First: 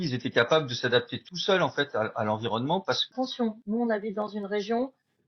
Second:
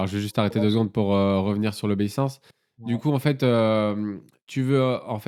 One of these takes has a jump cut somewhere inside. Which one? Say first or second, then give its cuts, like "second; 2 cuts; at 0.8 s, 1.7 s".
first; 1 cut; at 3.1 s